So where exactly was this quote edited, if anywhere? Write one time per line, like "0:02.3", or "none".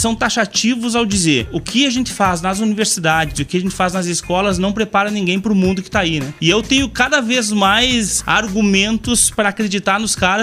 0:03.9